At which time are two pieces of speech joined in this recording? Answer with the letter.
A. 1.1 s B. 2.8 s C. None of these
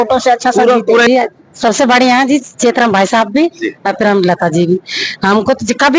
A